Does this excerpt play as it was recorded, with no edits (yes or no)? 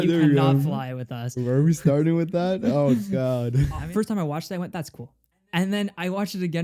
no